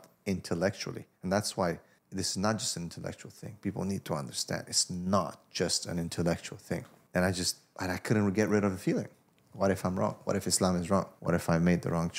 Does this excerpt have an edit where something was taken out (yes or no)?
yes